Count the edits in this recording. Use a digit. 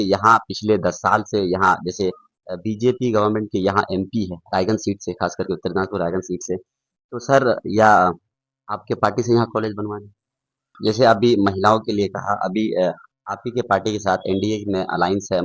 1